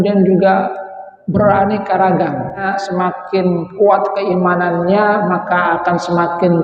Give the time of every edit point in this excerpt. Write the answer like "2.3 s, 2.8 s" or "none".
2.7 s